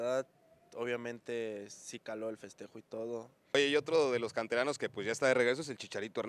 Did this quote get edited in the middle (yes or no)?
yes